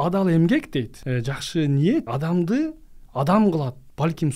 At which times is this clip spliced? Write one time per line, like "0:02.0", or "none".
0:01.0
0:02.1